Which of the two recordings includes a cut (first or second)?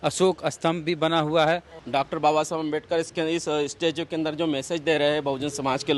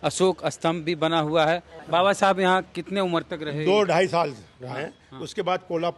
second